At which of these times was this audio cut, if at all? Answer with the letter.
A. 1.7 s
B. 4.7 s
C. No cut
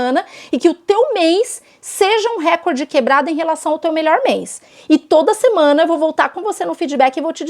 B